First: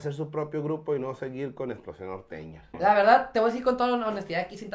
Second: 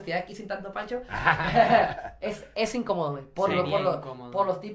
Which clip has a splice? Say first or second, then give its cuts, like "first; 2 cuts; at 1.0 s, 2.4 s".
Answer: first; 1 cut; at 2.7 s